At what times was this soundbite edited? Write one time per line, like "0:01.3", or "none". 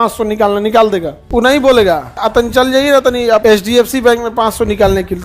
0:01.2
0:02.1
0:03.4